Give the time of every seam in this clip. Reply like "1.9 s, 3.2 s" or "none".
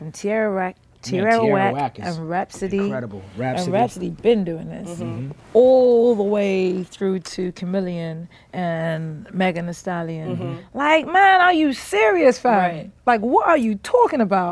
none